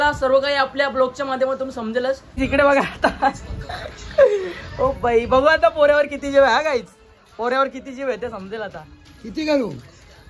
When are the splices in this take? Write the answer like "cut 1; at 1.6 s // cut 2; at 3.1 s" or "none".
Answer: cut 1; at 2.3 s